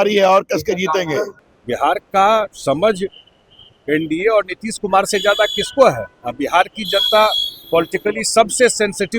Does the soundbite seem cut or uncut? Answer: cut